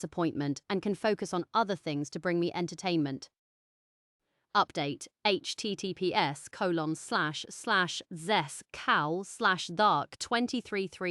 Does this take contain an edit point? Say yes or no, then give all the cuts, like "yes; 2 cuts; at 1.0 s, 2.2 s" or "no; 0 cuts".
no; 0 cuts